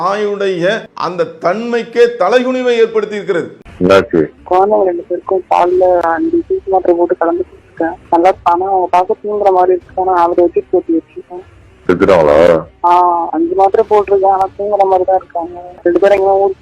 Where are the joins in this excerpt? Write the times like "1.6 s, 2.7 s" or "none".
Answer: 0.9 s

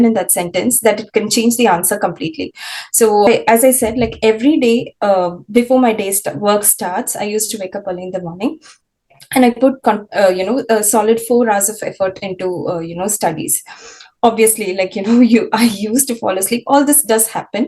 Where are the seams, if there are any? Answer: 3.2 s

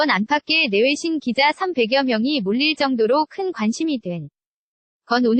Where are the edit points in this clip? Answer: none

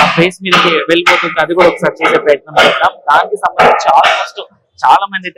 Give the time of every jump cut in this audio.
none

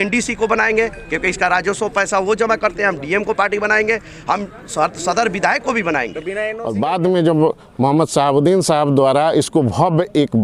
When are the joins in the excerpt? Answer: 6.5 s

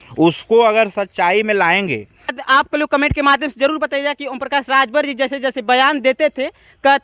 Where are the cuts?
2.4 s

